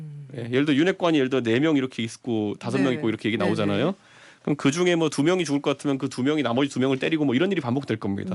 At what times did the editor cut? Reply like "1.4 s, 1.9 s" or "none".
none